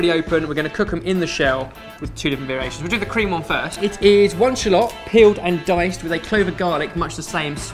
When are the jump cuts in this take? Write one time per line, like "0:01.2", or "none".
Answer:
none